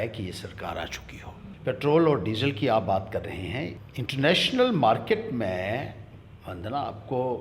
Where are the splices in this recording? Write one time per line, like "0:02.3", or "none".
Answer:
0:01.5
0:03.8